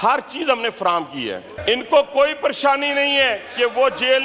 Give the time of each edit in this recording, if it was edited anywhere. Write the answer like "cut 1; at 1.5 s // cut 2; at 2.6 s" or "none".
cut 1; at 1.5 s